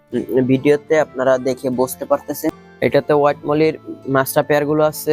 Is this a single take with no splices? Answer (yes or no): no